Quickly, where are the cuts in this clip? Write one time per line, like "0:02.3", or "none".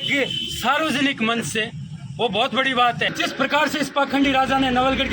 0:03.1